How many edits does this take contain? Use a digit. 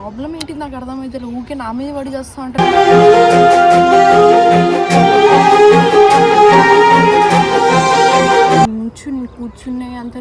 1